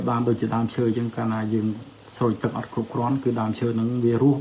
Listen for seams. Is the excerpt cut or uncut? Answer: uncut